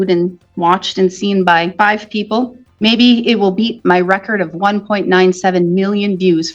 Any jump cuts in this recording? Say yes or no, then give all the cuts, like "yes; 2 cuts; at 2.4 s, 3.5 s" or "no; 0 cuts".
yes; 2 cuts; at 1.7 s, 2.6 s